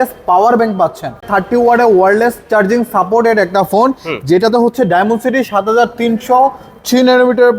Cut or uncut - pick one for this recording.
cut